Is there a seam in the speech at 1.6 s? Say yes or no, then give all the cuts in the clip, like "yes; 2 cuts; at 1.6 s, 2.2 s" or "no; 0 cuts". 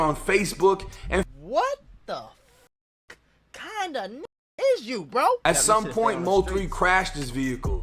no; 1 cut; at 5.4 s